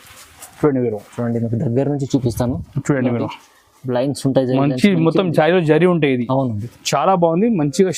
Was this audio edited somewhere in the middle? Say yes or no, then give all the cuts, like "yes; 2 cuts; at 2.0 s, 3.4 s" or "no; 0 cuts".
no; 0 cuts